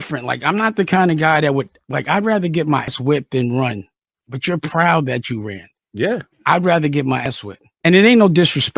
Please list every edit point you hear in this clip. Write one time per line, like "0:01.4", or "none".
0:02.9
0:07.3